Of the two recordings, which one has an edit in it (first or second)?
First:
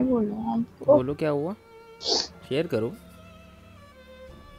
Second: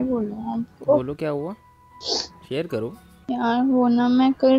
second